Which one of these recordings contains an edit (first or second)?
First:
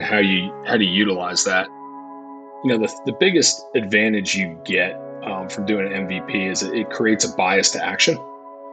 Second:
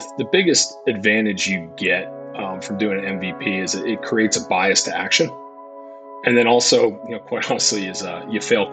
first